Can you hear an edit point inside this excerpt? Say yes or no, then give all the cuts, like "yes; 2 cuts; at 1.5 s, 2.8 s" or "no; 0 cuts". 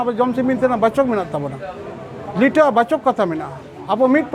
no; 0 cuts